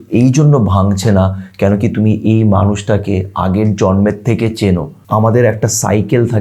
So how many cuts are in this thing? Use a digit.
1